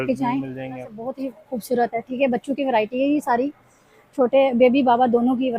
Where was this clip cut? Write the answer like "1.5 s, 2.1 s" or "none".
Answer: 1.0 s